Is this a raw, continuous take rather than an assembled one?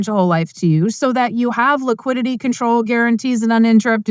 yes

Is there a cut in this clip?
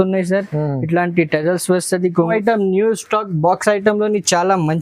yes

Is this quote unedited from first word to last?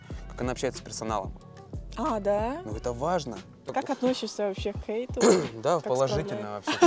no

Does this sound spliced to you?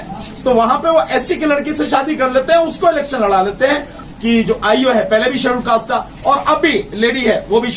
yes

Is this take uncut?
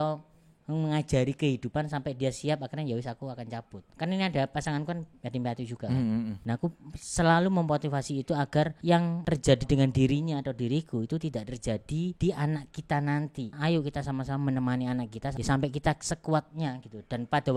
no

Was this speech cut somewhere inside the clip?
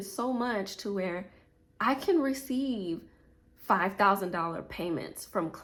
no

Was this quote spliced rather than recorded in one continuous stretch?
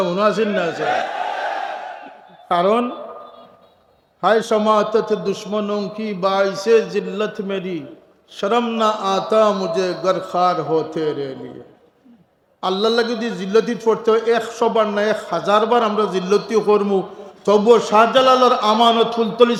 no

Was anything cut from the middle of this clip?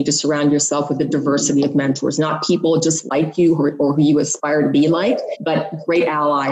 no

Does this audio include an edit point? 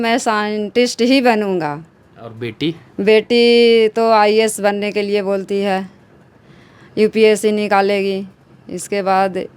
no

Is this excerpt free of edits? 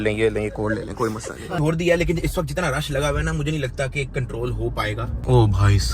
no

